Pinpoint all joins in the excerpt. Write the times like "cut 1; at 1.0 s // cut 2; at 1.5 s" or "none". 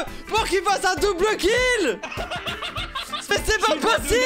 cut 1; at 3.3 s